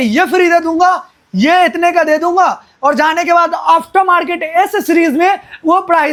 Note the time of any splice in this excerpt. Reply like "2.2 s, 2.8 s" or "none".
none